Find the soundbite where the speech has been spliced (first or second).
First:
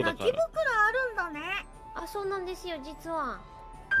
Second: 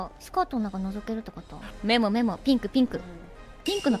second